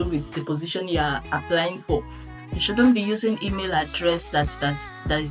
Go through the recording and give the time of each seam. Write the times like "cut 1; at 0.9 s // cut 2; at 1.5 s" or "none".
cut 1; at 2.3 s